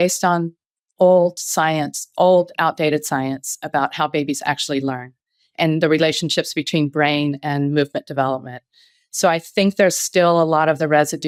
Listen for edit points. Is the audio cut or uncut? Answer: uncut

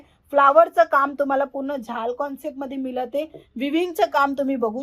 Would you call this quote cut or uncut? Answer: uncut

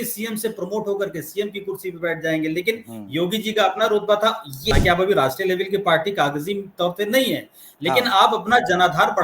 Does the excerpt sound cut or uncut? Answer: cut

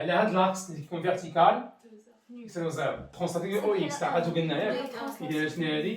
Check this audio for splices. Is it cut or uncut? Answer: cut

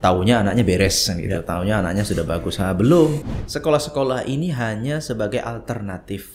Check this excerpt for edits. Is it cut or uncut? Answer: cut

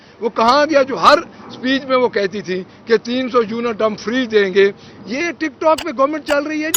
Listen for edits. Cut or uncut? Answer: uncut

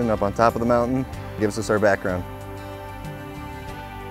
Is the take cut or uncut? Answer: uncut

